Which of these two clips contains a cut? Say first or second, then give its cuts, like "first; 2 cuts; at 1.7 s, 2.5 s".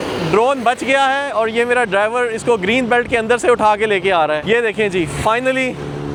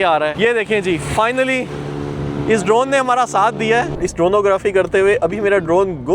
second; 1 cut; at 3.9 s